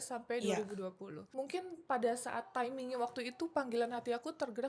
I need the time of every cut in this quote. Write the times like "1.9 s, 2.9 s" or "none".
1.2 s